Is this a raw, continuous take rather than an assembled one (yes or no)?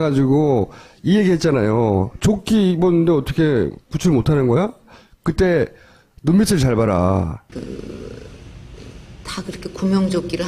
no